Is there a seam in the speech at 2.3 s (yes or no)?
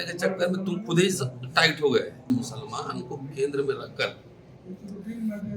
yes